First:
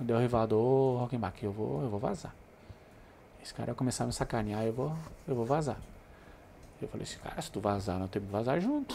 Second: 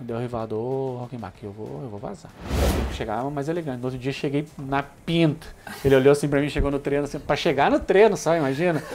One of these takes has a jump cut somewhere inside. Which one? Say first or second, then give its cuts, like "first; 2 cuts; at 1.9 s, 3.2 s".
second; 1 cut; at 2.6 s